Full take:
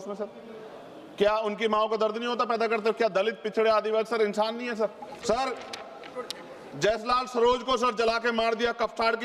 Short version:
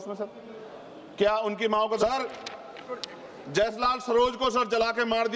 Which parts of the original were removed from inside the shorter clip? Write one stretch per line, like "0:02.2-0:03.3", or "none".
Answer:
0:02.0-0:05.3